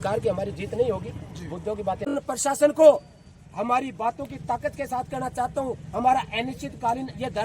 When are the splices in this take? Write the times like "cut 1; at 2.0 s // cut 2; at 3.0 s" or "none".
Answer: cut 1; at 2.0 s